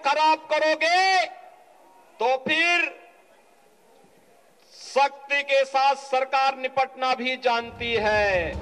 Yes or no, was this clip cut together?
no